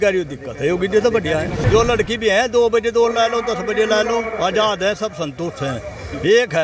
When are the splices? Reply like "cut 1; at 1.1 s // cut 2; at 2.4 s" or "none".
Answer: cut 1; at 1.6 s